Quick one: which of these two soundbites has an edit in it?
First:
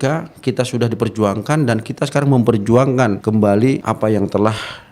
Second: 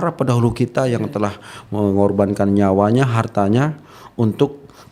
first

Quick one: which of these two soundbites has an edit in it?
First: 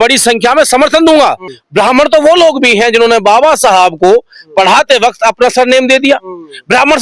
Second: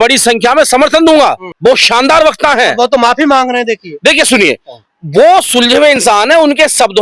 first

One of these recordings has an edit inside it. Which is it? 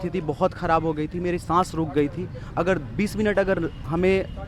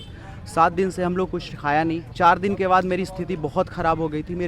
second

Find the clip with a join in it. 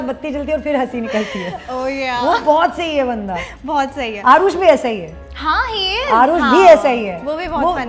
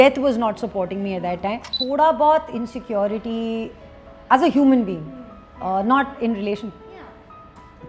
second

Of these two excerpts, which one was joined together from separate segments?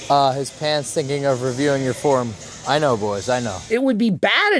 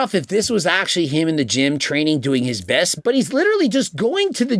first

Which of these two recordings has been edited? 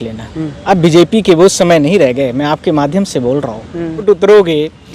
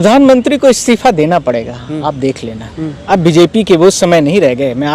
first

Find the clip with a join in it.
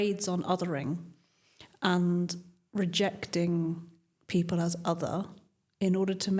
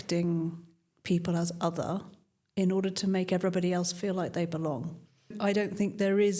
second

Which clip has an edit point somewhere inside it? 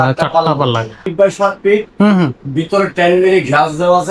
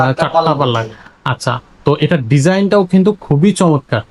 first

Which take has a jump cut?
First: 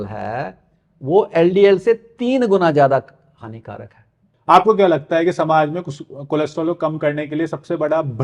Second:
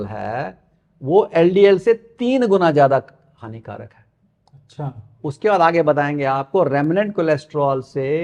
first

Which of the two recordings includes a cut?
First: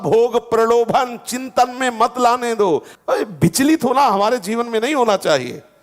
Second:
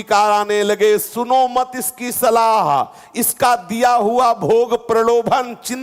first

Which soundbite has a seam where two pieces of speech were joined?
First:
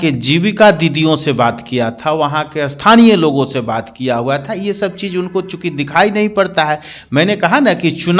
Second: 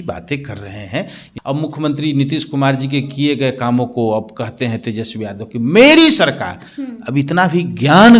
second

